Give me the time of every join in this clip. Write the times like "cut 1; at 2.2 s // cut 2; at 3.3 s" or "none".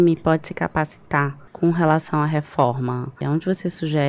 cut 1; at 1.4 s // cut 2; at 3.2 s